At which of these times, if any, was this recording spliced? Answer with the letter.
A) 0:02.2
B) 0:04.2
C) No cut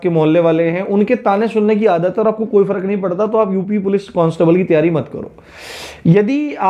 C